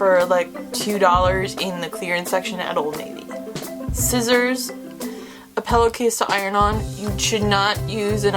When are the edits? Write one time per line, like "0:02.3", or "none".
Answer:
none